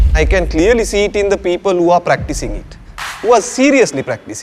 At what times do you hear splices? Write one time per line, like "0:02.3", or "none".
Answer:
none